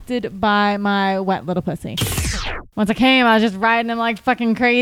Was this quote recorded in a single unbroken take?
no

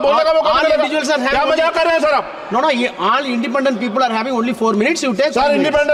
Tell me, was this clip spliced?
no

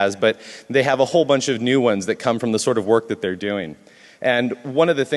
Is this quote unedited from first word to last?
yes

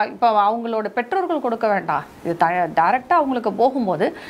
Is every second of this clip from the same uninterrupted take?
yes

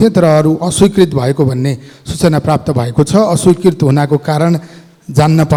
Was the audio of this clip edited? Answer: no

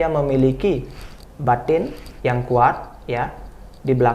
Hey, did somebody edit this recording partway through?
no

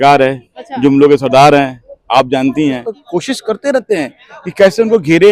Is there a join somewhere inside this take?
yes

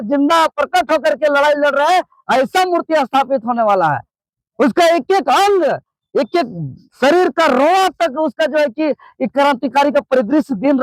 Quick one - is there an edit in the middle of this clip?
no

